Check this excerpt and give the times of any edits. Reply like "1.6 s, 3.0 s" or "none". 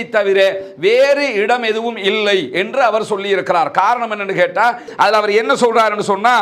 4.9 s